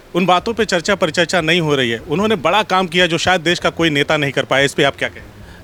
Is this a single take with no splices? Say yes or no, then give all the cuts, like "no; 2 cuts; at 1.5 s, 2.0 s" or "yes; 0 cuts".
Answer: yes; 0 cuts